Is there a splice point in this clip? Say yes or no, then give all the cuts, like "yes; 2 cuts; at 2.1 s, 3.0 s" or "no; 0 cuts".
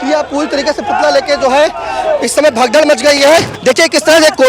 yes; 1 cut; at 3.5 s